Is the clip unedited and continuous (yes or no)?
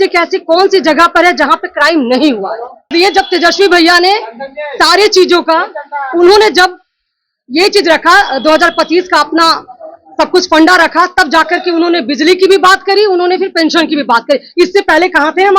no